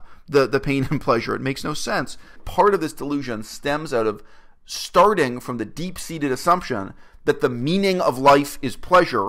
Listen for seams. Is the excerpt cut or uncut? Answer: cut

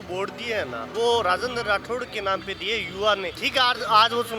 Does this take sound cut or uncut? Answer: cut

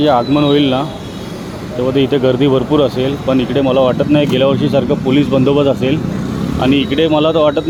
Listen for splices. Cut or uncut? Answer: uncut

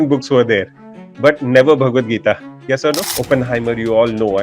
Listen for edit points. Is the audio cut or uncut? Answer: cut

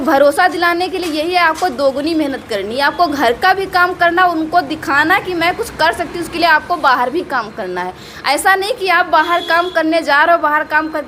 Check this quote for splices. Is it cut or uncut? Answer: uncut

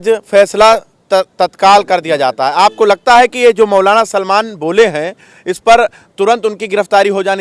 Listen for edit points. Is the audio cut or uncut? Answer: uncut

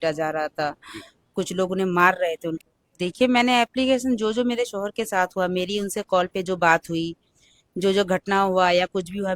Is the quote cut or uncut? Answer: cut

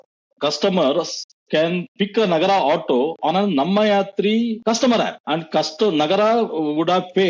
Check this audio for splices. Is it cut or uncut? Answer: cut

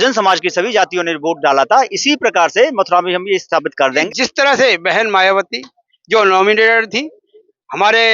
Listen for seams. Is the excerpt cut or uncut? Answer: cut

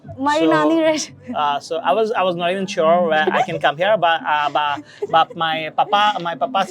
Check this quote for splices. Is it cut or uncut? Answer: uncut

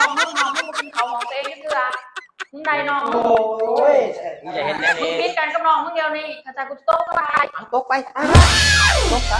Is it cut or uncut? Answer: uncut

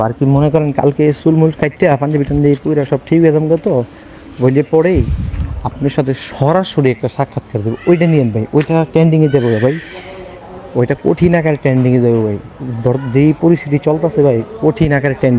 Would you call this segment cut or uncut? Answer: uncut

